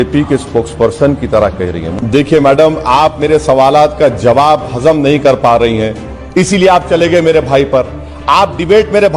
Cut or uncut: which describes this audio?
cut